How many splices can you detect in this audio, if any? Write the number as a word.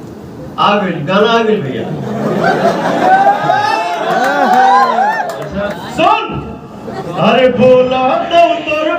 one